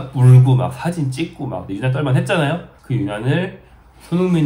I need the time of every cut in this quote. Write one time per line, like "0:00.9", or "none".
0:01.6
0:02.7